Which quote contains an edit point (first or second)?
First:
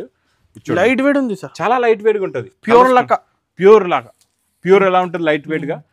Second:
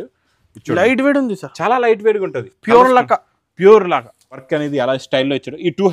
second